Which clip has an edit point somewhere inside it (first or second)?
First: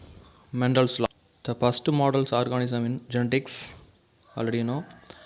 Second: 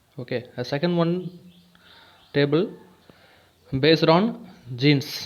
first